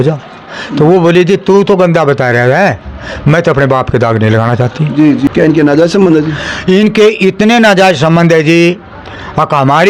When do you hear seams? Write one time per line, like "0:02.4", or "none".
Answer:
0:05.3